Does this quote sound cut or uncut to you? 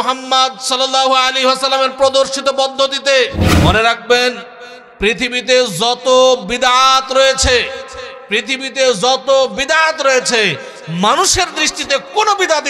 cut